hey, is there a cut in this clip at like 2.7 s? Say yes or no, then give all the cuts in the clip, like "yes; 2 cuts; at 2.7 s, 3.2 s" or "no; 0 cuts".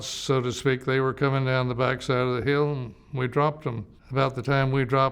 no; 1 cut; at 3.9 s